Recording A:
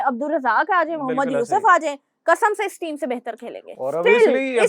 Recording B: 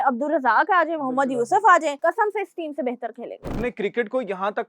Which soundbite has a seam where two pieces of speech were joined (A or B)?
B